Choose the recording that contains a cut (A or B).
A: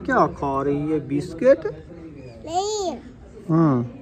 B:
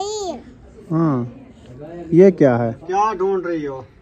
B